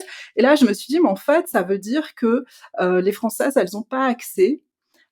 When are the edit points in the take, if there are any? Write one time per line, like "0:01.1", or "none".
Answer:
none